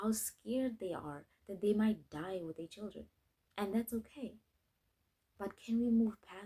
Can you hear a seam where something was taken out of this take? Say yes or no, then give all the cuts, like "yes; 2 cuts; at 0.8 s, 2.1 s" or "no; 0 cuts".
no; 0 cuts